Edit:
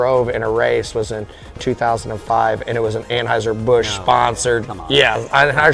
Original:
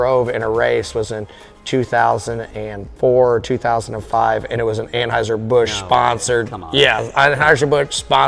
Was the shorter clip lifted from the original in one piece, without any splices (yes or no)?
no